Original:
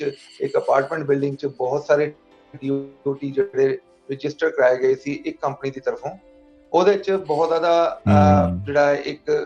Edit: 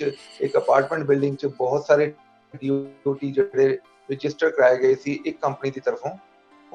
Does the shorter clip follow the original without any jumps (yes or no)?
yes